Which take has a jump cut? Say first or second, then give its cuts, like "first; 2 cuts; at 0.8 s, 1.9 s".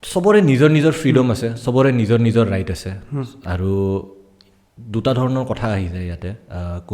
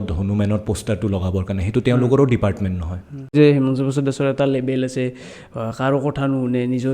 second; 1 cut; at 3.3 s